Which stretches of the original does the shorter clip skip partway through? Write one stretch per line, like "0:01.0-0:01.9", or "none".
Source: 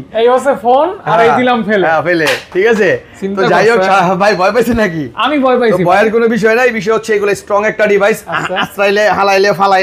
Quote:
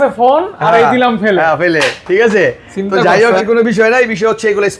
0:03.9-0:06.1

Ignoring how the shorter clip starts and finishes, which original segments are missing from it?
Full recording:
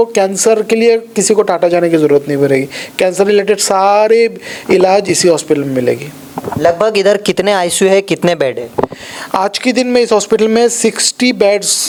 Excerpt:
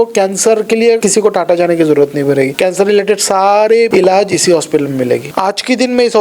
0:01.0-0:01.1
0:02.7-0:02.9
0:04.3-0:04.7
0:06.1-0:09.3

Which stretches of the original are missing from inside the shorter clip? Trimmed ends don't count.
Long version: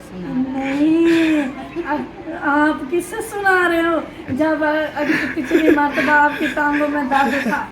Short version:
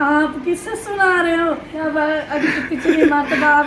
0:04.2-0:04.4

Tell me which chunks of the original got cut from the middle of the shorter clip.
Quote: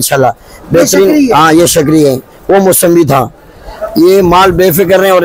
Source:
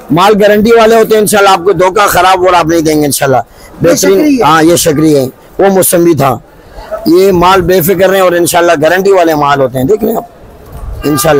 none

